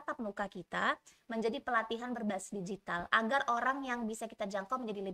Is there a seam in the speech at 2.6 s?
no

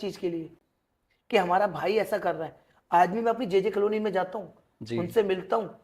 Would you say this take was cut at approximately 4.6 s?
no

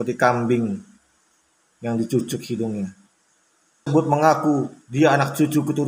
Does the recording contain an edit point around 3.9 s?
yes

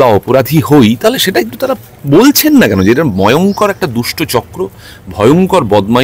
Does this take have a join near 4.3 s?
no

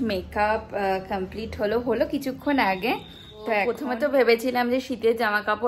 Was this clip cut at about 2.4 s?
no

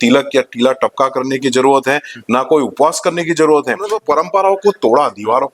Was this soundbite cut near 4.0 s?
yes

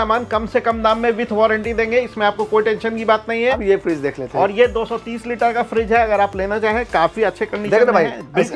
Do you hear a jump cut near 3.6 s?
yes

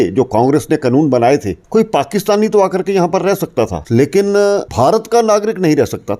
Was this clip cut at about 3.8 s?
yes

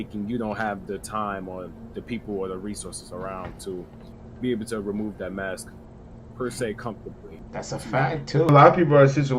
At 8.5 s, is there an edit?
yes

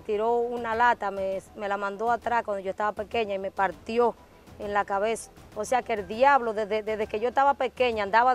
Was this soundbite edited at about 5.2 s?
yes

